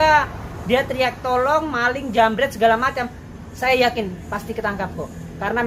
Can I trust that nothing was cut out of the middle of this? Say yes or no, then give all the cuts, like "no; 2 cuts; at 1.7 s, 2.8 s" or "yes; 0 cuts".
yes; 0 cuts